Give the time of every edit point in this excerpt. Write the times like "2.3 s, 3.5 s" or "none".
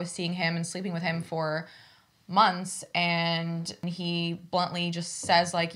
3.9 s